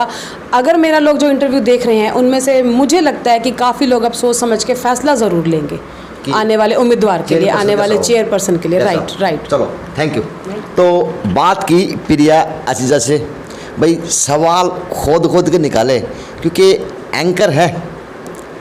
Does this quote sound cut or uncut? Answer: uncut